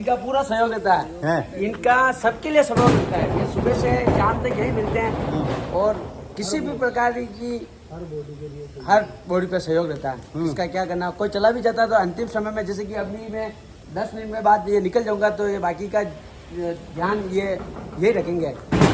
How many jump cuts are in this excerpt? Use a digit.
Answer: 0